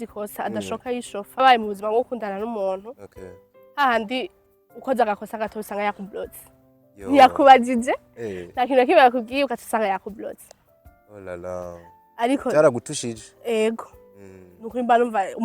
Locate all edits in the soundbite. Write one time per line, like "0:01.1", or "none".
0:01.4